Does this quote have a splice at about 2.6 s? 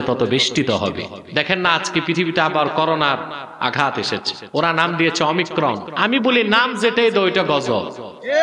no; 3 cuts; at 1.1 s, 4.4 s, 5.9 s

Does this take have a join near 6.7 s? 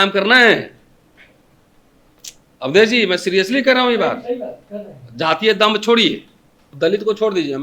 yes; 1 cut; at 6.7 s

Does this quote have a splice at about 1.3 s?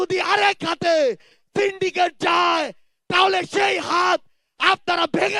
no; 0 cuts

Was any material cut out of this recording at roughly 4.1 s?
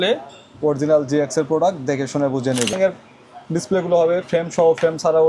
no; 1 cut; at 2.8 s

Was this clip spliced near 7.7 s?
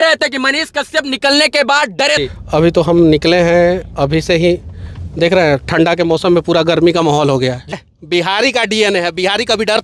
yes; 2 cuts; at 2.2 s, 7.7 s

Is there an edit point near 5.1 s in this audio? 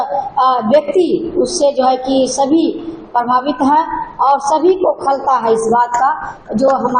no; 0 cuts

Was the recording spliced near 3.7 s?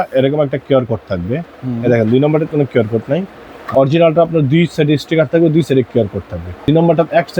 yes; 2 cuts; at 3.7 s, 6.6 s

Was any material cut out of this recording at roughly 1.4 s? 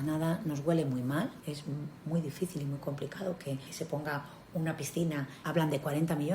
yes; 3 cuts; at 1.4 s, 3.7 s, 5.4 s

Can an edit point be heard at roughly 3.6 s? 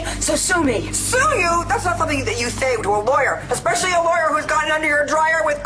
no; 0 cuts

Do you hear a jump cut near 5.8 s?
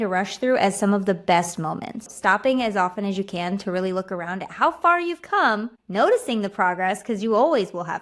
yes; 2 cuts; at 2.0 s, 5.8 s

